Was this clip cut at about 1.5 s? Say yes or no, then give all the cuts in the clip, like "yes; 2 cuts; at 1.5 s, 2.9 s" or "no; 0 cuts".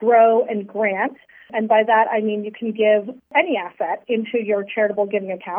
yes; 2 cuts; at 1.5 s, 3.3 s